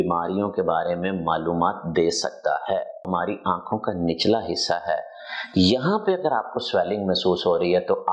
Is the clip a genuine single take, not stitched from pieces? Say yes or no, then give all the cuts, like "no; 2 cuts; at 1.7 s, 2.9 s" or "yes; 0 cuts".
no; 1 cut; at 3.1 s